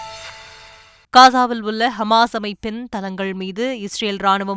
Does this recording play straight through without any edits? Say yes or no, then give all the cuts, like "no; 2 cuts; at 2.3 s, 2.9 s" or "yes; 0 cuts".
no; 1 cut; at 0.9 s